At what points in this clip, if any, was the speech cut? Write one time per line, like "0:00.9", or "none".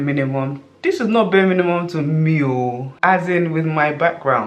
none